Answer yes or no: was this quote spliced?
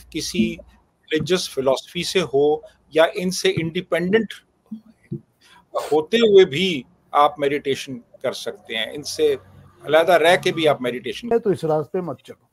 yes